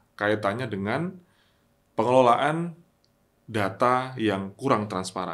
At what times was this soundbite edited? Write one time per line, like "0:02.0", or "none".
none